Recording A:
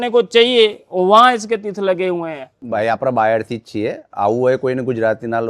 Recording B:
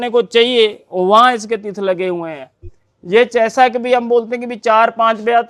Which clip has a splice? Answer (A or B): A